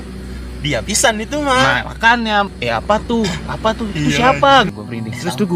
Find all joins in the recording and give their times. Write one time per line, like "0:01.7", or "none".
0:02.5
0:04.7